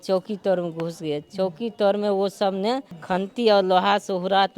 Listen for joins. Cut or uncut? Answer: cut